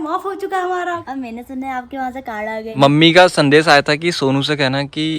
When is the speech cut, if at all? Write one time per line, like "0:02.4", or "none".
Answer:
0:01.0
0:02.7